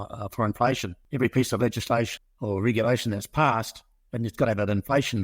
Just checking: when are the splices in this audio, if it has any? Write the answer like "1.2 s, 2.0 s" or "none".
0.9 s, 2.1 s